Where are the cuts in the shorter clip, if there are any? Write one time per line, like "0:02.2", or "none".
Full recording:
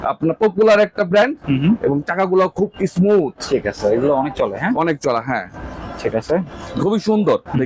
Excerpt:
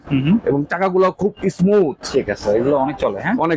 none